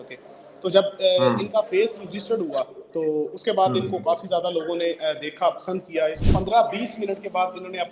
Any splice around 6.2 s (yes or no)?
yes